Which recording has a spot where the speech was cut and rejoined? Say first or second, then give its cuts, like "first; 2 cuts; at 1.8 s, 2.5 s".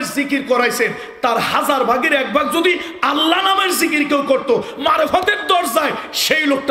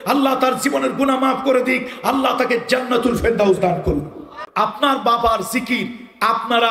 second; 1 cut; at 4.4 s